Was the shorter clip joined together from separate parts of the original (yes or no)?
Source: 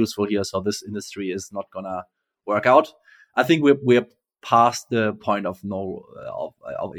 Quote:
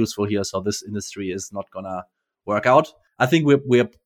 yes